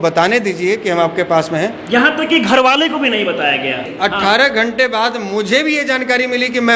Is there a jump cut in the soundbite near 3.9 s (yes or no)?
yes